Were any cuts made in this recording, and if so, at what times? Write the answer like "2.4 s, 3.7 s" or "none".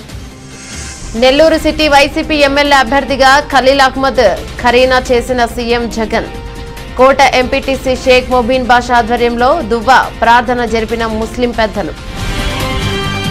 1.1 s, 12.0 s